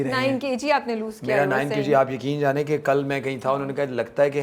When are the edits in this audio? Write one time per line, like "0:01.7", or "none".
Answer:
none